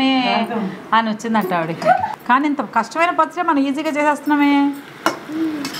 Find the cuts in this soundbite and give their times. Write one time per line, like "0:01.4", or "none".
0:02.1